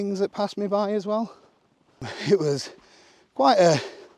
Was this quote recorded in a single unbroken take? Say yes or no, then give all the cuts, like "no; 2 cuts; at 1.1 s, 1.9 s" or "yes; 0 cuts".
no; 1 cut; at 2.0 s